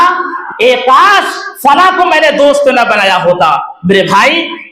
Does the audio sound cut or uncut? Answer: uncut